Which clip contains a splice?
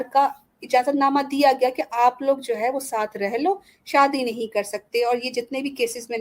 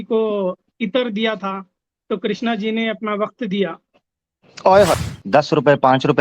second; 1 cut; at 5.0 s

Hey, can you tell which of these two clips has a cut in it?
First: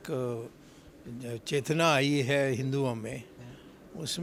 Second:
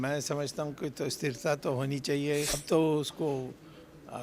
second; 1 cut; at 2.6 s

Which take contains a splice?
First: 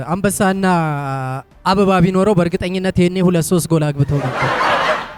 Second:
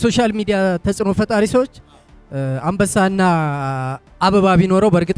first; 1 cut; at 4.3 s

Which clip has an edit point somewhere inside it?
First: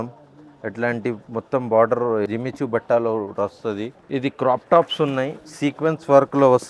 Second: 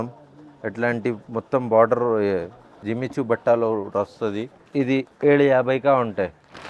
first; 2 cuts; at 2.3 s, 3.9 s

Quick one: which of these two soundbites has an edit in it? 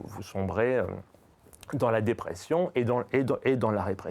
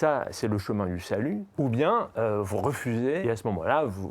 second; 2 cuts; at 1.5 s, 3.2 s

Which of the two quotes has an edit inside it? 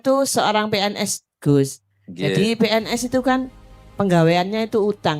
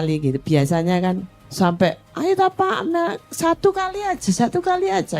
second; 2 cuts; at 1.4 s, 2.1 s

